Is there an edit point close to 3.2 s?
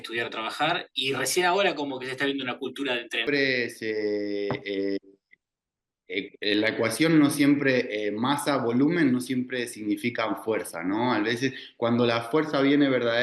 yes; 1 cut; at 3.2 s

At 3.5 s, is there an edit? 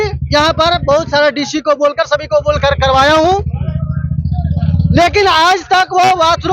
no; 0 cuts

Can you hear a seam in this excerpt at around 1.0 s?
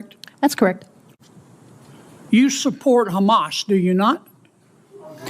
yes; 1 cut; at 1.0 s

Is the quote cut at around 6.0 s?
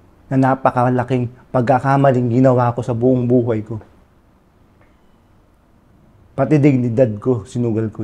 no; 0 cuts

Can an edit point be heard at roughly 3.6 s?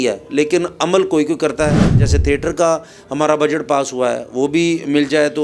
no; 1 cut; at 2.0 s

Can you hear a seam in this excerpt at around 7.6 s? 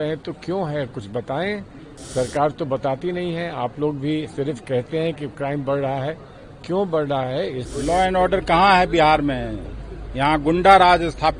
yes; 1 cut; at 7.6 s

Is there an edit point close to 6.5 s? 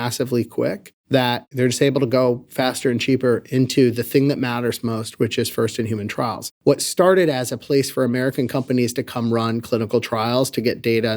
yes; 2 cuts; at 0.9 s, 6.5 s

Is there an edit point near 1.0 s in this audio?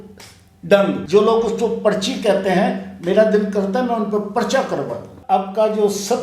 yes; 2 cuts; at 1.0 s, 5.1 s

